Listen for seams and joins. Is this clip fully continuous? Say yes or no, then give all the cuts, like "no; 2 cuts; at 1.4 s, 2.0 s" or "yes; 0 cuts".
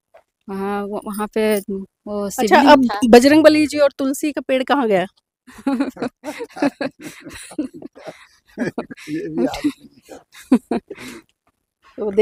yes; 0 cuts